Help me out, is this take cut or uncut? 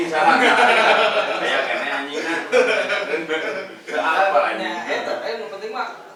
uncut